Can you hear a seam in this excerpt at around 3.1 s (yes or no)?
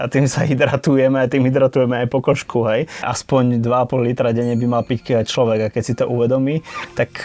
yes